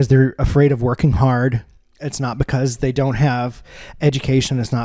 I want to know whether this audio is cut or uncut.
uncut